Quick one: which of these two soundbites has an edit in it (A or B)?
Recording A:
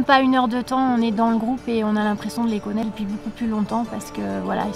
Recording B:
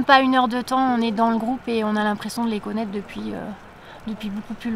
A